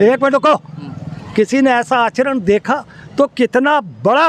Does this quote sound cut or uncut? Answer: uncut